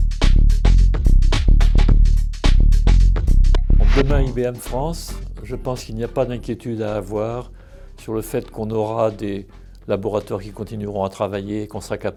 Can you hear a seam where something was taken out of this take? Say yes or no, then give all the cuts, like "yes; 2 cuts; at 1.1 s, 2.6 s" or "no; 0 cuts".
no; 0 cuts